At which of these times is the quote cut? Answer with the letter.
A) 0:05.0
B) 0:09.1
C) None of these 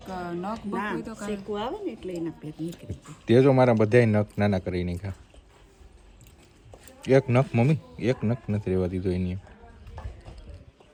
C